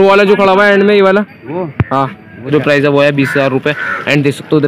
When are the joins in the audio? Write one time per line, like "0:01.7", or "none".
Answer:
0:02.5